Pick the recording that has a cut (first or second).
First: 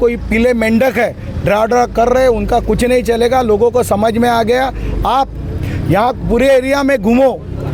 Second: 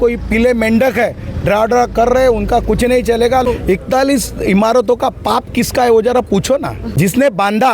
second